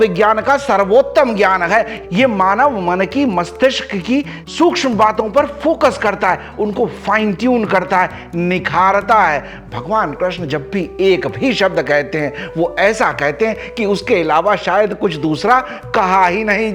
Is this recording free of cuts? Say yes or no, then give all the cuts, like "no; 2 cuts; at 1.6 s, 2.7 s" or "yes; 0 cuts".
yes; 0 cuts